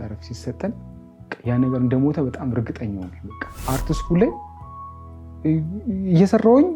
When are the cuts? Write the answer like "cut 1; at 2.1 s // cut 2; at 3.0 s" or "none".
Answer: cut 1; at 3.6 s